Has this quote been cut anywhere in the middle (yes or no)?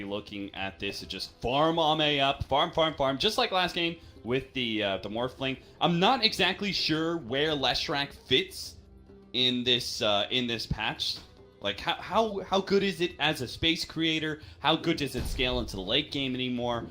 yes